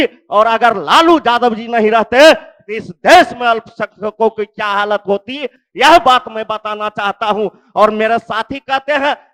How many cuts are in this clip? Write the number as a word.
zero